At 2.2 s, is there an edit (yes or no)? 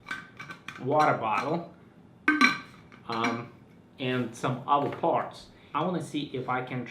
no